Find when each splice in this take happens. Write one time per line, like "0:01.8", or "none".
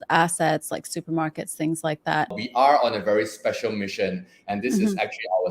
0:02.3